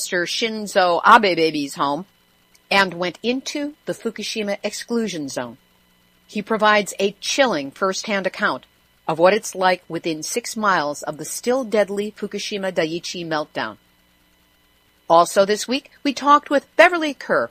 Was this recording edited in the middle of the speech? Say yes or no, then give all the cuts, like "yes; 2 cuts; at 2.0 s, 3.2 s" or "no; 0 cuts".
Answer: no; 0 cuts